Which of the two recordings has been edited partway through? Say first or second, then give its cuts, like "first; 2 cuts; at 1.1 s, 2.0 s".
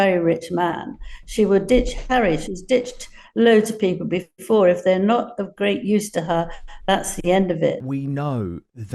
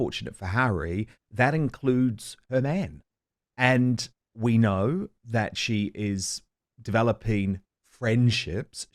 first; 1 cut; at 7.8 s